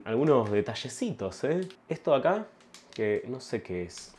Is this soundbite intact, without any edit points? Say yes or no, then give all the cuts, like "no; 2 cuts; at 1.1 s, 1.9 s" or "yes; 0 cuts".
yes; 0 cuts